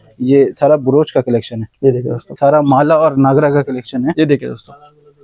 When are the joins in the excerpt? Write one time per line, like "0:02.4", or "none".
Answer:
0:02.4

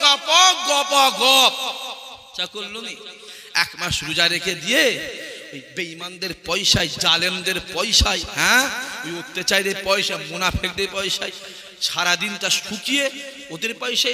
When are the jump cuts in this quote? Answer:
0:02.2

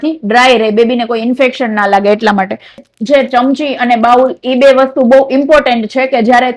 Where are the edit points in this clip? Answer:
0:02.9

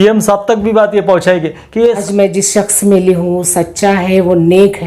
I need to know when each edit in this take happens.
0:02.0

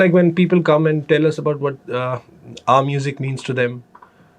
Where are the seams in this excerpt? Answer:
none

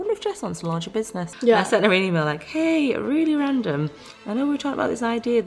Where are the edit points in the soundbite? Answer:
0:01.3

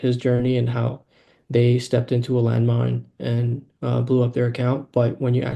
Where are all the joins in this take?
none

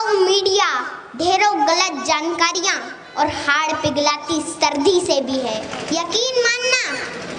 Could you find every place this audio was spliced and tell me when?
0:05.7

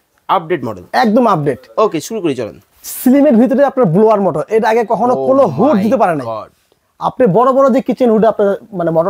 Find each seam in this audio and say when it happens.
none

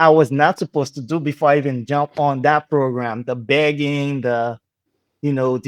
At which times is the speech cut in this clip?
none

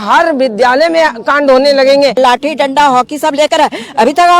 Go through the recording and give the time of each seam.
0:02.2

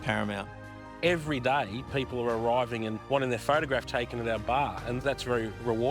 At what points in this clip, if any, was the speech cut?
0:00.9
0:05.0

